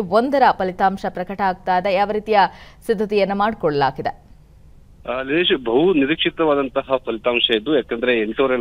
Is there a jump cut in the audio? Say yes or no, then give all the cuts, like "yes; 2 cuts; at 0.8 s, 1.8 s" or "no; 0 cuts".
yes; 1 cut; at 4.8 s